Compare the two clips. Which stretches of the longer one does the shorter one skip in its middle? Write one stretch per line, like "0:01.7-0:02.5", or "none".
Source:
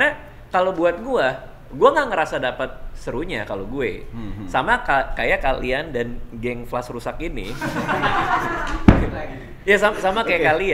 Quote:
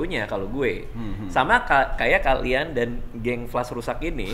none